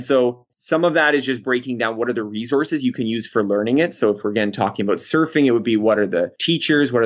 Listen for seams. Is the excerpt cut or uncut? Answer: uncut